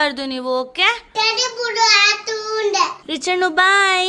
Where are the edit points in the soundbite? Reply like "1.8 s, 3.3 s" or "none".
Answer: 3.0 s